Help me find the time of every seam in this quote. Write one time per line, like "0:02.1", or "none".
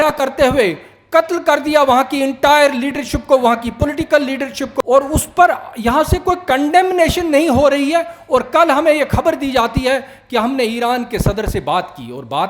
0:04.7